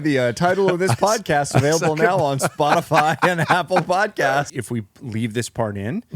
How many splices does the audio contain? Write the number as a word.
one